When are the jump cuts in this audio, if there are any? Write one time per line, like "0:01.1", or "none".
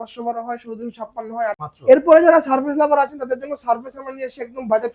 0:01.7